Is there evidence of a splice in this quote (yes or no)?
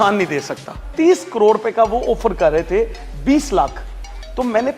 yes